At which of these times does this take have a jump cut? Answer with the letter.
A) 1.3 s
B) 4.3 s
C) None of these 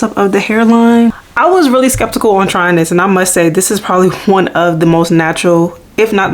A